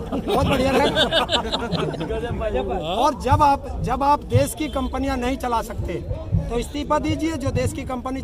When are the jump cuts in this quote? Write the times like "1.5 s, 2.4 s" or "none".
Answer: none